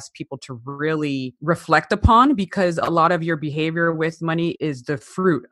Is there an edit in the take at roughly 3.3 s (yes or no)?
no